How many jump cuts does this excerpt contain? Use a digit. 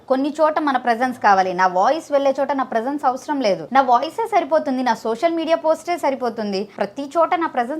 2